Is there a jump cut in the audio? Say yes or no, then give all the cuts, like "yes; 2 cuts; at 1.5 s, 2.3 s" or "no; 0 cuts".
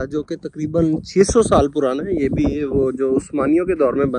no; 0 cuts